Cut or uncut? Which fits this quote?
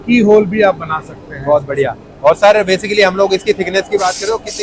uncut